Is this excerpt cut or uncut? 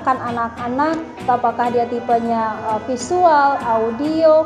cut